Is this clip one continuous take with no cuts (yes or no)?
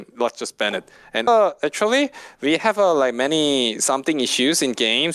no